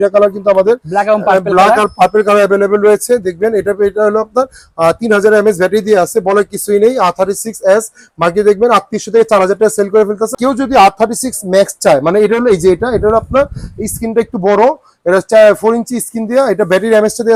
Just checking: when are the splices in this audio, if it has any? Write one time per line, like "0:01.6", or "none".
none